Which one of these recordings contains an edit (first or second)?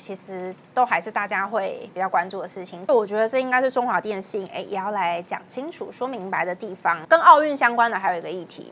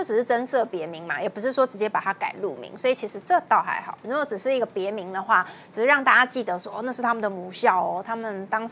first